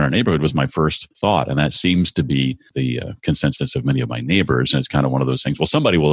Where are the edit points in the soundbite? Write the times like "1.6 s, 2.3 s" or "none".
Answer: 1.1 s, 2.6 s

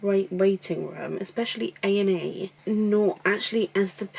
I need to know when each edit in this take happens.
none

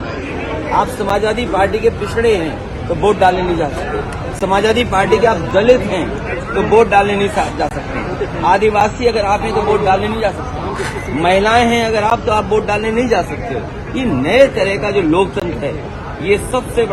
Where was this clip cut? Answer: none

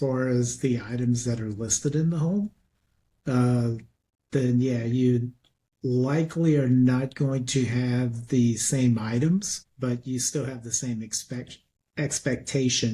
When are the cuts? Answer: 9.6 s

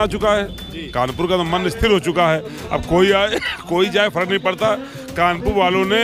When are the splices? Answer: none

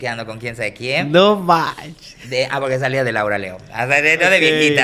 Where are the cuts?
none

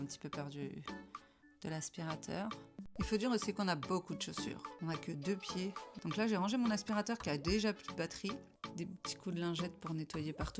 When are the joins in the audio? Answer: 2.9 s, 4.7 s, 5.9 s, 8.6 s

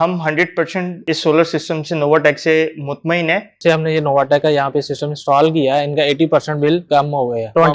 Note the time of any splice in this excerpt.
1.0 s, 3.6 s

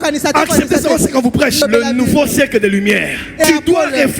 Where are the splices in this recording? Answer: 1.6 s, 3.4 s

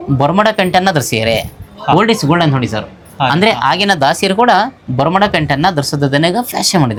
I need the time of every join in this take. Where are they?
none

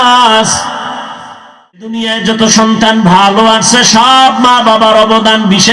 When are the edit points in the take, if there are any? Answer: 2.1 s

